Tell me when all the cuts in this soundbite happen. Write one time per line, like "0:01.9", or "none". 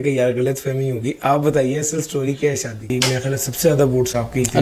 0:02.9